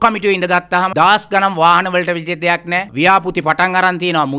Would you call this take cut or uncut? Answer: cut